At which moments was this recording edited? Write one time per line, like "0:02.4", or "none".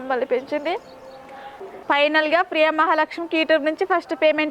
0:01.7